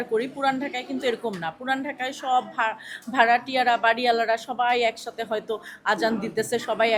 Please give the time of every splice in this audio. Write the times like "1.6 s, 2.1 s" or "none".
none